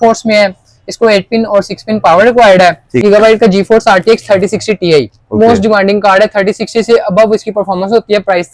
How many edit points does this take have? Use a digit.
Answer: 1